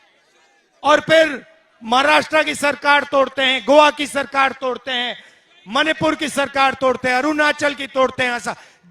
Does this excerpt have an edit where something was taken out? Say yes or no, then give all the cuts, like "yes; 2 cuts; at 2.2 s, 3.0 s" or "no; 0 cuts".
no; 0 cuts